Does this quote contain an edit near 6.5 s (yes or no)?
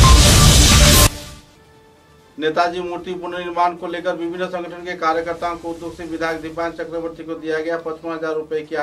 no